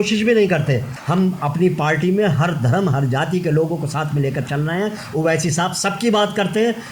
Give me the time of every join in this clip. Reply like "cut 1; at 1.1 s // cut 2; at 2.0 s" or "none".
cut 1; at 0.9 s

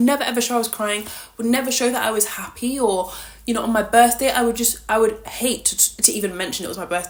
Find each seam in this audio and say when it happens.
none

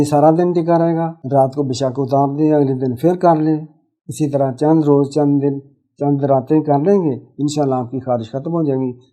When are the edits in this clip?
cut 1; at 1.2 s

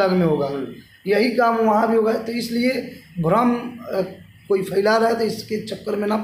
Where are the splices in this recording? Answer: none

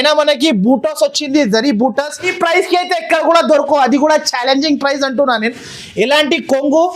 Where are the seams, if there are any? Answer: cut 1; at 2.3 s

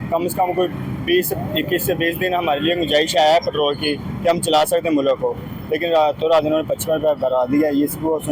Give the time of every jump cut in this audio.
none

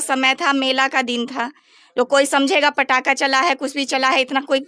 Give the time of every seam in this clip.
none

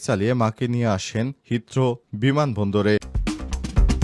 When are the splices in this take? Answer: cut 1; at 3.1 s

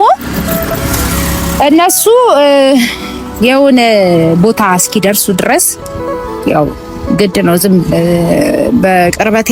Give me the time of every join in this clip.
none

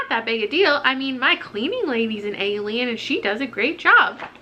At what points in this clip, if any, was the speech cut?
none

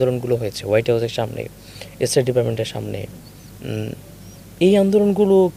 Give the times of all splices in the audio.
none

